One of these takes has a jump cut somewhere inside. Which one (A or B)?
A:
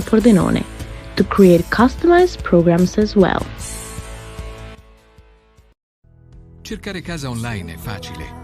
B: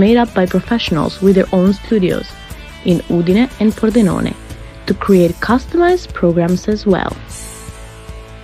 A